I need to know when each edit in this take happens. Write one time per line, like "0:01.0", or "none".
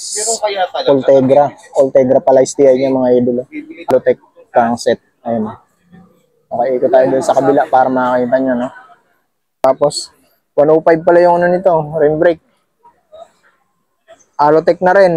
0:03.9
0:09.6